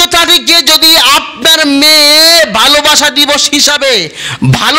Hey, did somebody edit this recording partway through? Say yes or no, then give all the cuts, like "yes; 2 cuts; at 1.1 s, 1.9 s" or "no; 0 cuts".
no; 0 cuts